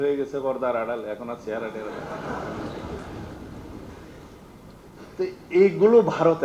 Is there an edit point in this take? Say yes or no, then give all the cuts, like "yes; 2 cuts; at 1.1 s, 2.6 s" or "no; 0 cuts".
no; 0 cuts